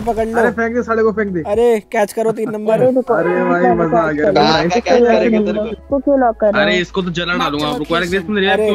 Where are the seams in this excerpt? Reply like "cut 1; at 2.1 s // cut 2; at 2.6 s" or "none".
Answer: cut 1; at 5.7 s